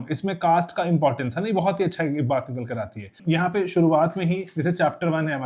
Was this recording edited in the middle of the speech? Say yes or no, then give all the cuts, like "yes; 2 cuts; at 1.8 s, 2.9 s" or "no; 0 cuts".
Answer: yes; 1 cut; at 3.1 s